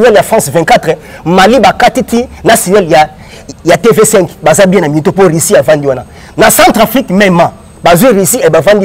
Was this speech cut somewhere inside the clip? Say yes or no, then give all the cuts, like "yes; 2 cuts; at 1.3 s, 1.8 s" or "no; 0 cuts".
no; 0 cuts